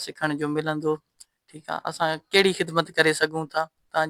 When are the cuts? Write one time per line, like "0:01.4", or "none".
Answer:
none